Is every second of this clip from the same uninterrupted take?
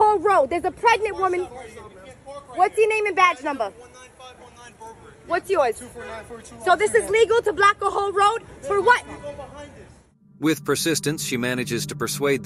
yes; 0 cuts

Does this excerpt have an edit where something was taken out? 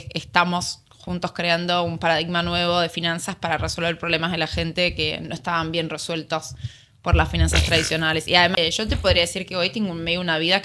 yes; 1 cut; at 8.7 s

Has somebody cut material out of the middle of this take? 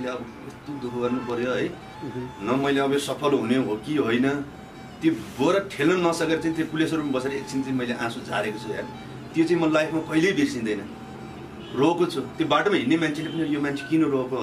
no; 0 cuts

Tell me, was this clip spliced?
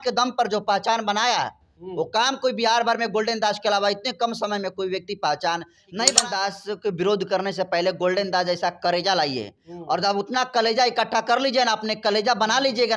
yes; 1 cut; at 6.1 s

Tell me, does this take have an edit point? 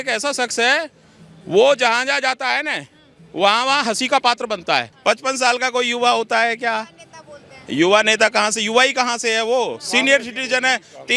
yes; 1 cut; at 4.9 s

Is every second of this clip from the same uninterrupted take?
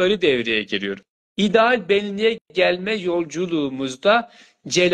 no; 1 cut; at 0.9 s

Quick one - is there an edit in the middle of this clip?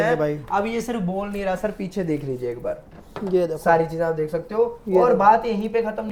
no; 0 cuts

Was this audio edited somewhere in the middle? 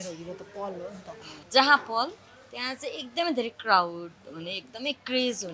yes; 1 cut; at 1.3 s

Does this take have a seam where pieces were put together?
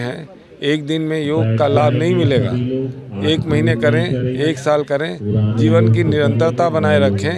no; 0 cuts

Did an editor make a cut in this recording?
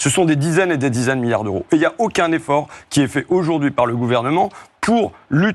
no; 0 cuts

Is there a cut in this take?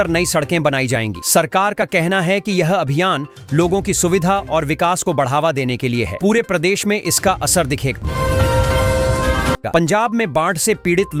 no; 0 cuts

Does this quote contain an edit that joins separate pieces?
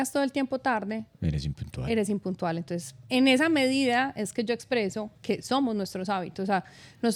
no; 0 cuts

